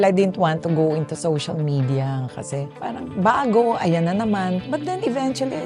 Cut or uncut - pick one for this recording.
cut